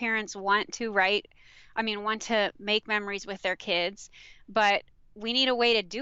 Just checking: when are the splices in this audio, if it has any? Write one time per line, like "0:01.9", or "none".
none

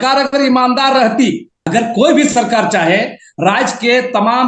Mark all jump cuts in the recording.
0:01.5

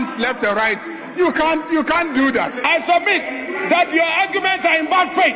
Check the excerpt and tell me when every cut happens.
0:02.7

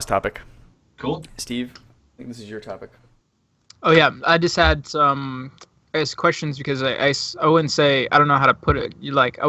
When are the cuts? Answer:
none

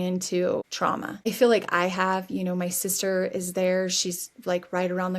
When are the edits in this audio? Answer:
0:01.0

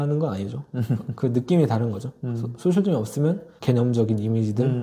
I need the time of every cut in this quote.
0:03.5

